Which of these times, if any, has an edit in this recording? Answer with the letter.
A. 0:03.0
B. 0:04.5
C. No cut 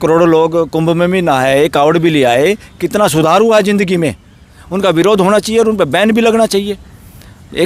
B